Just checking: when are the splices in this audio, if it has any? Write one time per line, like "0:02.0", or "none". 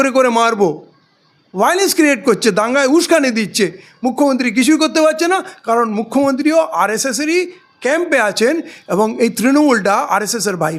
none